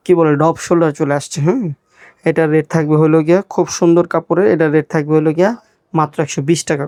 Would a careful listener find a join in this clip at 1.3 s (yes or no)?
no